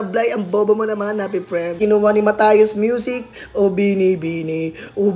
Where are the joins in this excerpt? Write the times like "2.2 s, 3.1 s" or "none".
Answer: 1.7 s